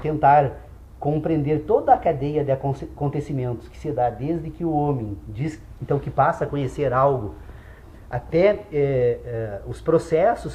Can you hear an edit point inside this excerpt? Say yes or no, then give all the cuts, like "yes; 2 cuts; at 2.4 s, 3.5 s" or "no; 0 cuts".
no; 0 cuts